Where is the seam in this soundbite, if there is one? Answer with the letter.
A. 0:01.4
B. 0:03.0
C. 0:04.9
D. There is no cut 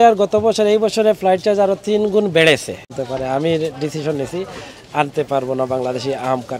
B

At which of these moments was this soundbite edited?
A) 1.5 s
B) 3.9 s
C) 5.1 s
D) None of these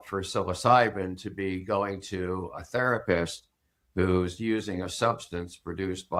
D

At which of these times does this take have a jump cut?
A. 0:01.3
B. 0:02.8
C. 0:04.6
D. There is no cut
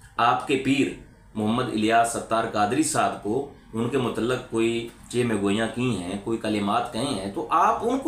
D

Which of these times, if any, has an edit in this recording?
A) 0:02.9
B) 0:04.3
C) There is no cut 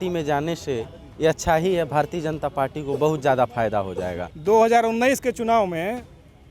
B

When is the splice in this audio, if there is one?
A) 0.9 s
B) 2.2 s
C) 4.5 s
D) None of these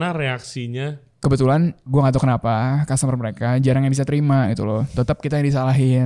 D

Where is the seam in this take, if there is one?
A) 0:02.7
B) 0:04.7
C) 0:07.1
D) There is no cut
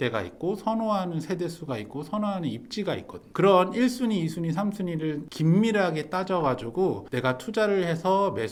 D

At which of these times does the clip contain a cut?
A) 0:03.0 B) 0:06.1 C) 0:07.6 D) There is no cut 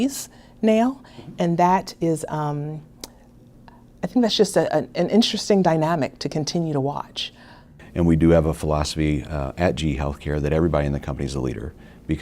C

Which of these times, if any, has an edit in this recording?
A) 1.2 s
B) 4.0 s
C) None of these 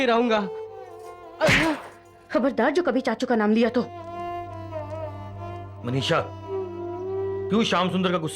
C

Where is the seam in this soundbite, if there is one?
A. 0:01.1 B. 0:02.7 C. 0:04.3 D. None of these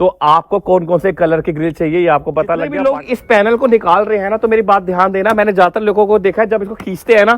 B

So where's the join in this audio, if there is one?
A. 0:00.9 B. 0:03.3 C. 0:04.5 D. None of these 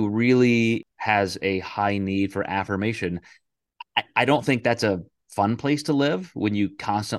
A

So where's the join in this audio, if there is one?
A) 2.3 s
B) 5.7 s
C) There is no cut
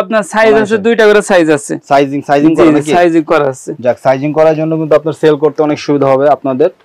C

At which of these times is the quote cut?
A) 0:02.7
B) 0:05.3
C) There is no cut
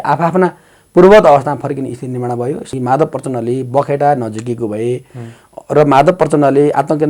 A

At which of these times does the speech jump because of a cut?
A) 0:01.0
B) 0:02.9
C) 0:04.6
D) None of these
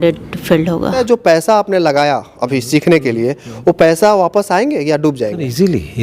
A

